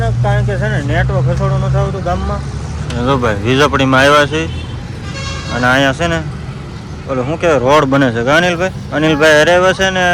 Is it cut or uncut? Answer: uncut